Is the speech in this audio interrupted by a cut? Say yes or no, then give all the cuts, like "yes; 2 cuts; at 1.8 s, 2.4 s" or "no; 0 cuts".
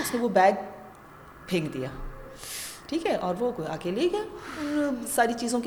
no; 0 cuts